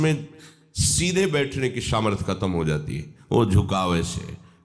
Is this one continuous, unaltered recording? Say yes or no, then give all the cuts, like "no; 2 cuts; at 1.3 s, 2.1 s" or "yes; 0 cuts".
yes; 0 cuts